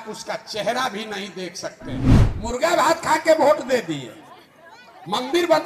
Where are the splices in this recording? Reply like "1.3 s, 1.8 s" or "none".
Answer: 2.2 s